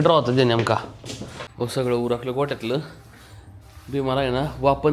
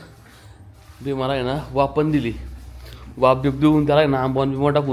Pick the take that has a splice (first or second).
first